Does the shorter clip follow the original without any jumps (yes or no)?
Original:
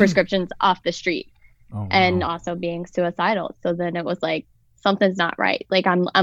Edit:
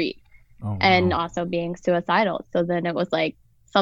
yes